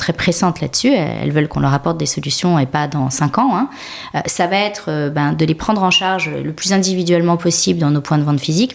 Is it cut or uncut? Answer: uncut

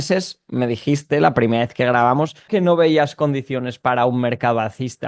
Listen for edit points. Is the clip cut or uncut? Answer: cut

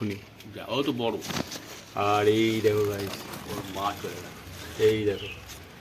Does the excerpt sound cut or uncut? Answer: uncut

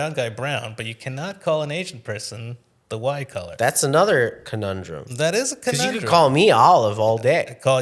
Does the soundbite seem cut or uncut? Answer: uncut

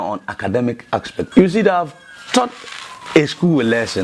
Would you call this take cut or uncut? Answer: cut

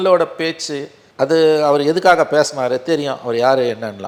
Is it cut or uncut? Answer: uncut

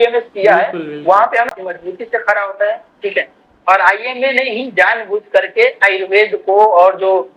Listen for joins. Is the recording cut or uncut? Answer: cut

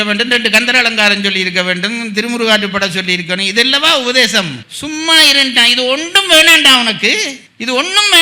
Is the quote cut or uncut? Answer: uncut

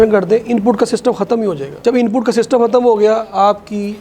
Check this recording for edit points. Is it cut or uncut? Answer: uncut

